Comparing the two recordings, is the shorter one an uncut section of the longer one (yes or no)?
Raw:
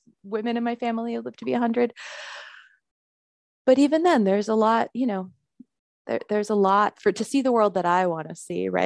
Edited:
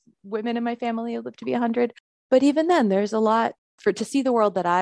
no